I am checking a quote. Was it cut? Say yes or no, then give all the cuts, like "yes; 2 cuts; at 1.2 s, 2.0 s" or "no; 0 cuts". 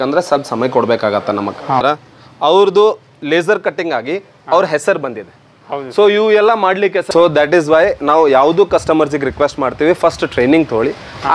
yes; 2 cuts; at 1.8 s, 7.1 s